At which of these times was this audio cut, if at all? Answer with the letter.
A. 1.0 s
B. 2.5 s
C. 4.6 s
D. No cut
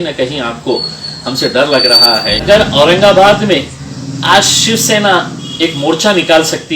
B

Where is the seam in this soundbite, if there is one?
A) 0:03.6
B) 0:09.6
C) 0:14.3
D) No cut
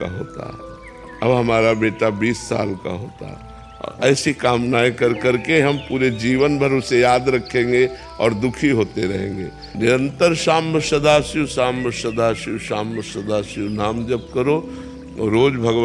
B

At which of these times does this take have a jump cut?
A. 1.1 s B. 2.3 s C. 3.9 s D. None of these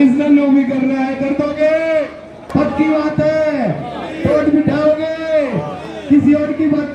B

